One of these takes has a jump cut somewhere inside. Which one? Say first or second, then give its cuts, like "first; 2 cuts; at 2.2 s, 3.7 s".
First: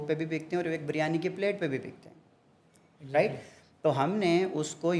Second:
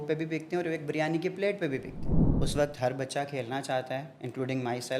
second; 1 cut; at 2.3 s